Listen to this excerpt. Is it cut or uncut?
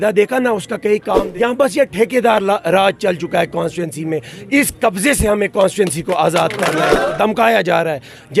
cut